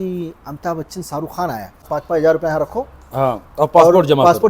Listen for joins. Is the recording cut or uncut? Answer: cut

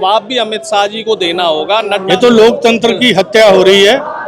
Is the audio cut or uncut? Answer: cut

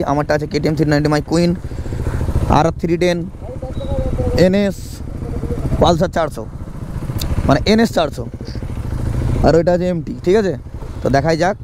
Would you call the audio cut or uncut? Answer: uncut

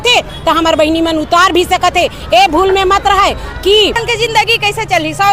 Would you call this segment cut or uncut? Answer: cut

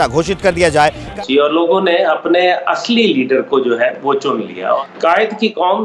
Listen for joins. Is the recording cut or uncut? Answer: cut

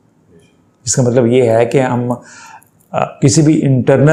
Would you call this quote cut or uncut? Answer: uncut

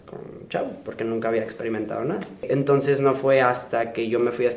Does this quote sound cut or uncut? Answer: cut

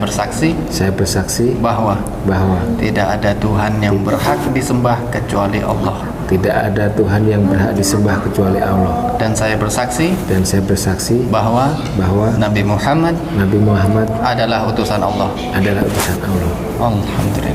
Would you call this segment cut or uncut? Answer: uncut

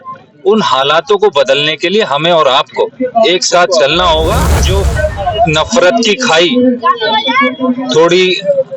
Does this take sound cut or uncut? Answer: cut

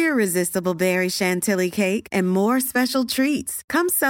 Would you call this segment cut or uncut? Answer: uncut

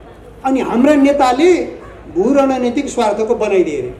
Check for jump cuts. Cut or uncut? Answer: uncut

